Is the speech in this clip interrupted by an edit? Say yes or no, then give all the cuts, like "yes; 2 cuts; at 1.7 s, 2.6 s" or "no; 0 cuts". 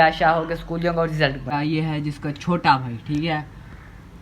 yes; 1 cut; at 1.4 s